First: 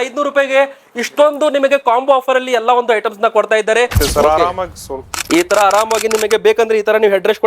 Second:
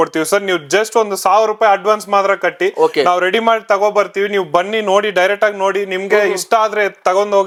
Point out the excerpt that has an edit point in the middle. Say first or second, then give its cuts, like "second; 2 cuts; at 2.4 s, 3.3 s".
first; 1 cut; at 4.0 s